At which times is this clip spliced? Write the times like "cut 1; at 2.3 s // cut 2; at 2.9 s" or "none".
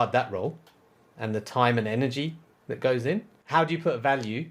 cut 1; at 3.4 s